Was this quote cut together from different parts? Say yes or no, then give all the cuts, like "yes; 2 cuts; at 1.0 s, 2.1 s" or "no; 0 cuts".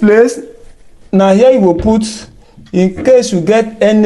no; 0 cuts